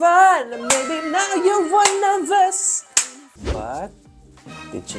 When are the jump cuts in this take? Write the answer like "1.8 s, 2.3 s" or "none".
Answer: 3.3 s